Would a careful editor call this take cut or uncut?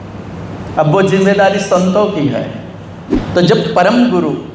cut